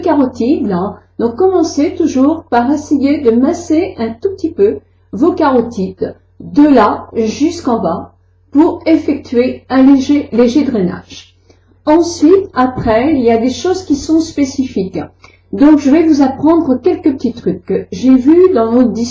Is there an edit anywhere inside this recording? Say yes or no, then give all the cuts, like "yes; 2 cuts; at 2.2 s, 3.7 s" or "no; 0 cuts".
no; 0 cuts